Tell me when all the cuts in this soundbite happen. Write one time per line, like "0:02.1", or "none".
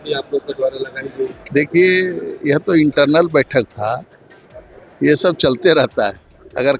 none